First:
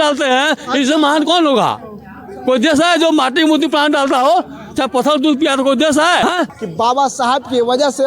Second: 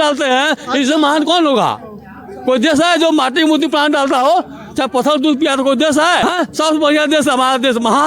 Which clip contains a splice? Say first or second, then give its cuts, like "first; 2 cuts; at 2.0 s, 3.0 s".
first; 1 cut; at 6.5 s